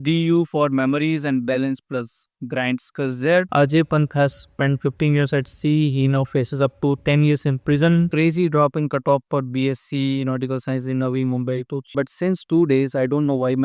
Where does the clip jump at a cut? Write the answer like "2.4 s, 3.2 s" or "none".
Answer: 3.5 s, 8.1 s, 11.9 s

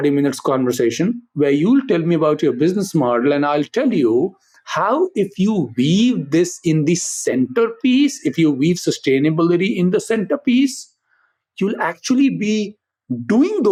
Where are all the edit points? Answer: none

